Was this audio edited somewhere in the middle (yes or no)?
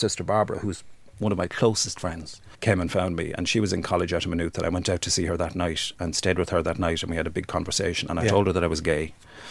yes